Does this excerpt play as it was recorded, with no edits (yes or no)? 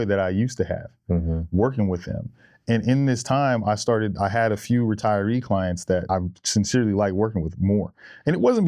no